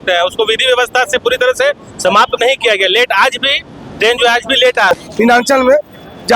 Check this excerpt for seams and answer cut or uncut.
cut